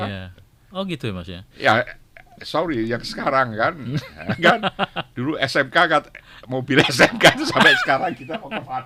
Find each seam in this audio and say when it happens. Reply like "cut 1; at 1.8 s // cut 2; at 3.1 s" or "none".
none